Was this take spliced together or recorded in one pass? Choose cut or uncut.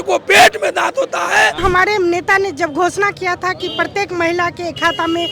cut